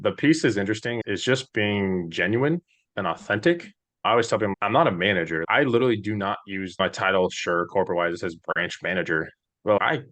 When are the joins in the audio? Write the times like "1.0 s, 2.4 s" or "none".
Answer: 1.0 s, 4.5 s, 5.4 s, 6.8 s